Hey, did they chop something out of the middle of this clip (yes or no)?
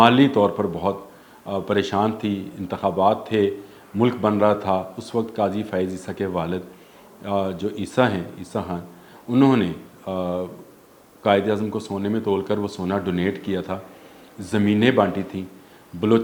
no